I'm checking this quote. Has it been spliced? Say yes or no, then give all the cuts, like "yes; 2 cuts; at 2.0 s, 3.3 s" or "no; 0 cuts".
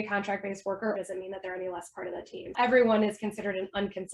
yes; 2 cuts; at 1.0 s, 2.5 s